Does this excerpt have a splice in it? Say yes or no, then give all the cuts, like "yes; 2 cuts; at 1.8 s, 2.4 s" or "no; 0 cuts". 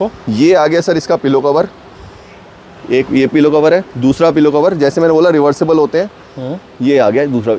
no; 0 cuts